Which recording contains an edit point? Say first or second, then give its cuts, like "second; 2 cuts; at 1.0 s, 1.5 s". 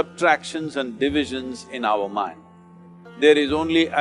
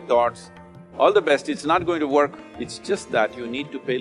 second; 1 cut; at 2.4 s